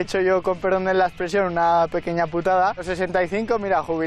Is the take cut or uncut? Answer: cut